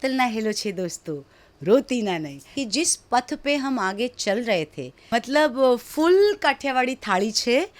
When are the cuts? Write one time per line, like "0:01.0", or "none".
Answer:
0:02.5
0:05.1